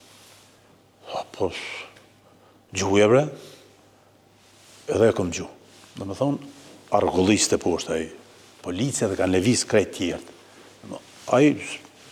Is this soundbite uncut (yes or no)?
yes